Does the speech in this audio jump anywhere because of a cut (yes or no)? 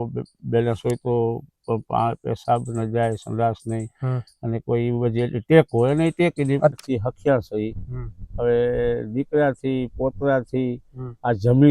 yes